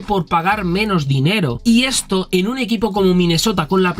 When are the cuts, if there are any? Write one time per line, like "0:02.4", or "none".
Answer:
0:01.6